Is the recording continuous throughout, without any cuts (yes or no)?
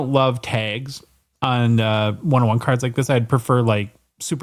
yes